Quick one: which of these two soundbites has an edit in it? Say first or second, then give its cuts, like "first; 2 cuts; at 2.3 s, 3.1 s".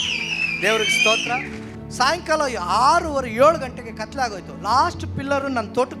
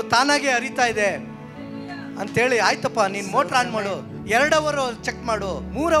first; 1 cut; at 1.6 s